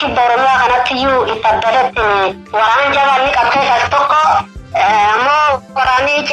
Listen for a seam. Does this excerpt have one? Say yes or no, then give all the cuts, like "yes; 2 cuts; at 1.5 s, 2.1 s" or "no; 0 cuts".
yes; 1 cut; at 2.4 s